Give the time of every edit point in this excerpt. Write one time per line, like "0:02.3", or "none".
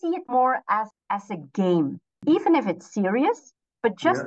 0:00.9
0:02.1